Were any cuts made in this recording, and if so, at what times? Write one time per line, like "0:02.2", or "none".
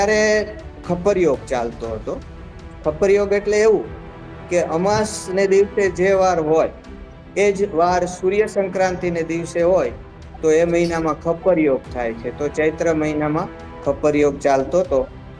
none